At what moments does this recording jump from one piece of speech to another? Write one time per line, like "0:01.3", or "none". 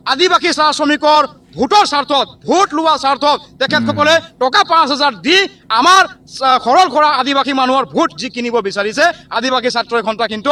none